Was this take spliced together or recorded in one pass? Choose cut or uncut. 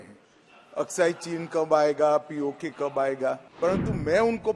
cut